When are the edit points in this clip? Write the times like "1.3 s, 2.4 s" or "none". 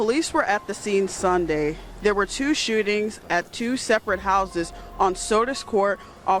none